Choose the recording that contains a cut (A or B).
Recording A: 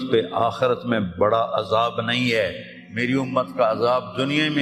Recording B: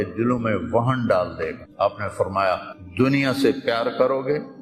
B